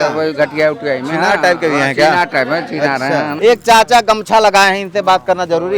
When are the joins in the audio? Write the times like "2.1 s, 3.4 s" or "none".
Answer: 3.3 s